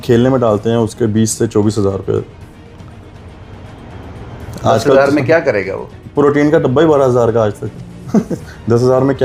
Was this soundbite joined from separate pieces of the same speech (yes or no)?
no